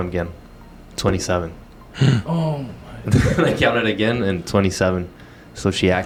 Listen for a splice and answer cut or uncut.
uncut